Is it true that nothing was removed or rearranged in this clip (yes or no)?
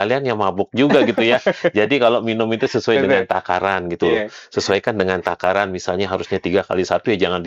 yes